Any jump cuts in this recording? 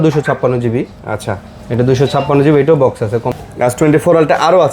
yes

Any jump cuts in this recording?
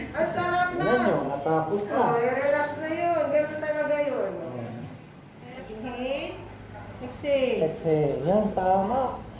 yes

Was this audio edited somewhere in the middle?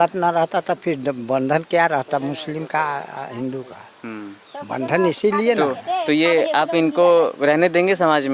no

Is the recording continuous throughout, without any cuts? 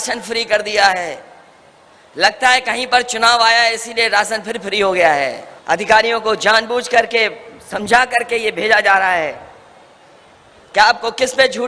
no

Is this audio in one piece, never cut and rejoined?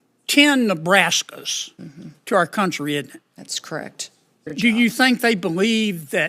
no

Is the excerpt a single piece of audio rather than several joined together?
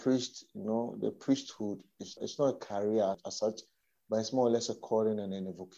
no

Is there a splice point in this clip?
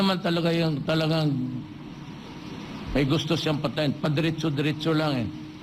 yes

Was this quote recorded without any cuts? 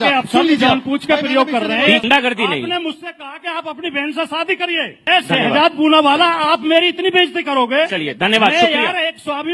no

